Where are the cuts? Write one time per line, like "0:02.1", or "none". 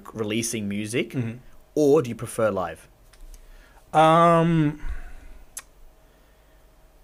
none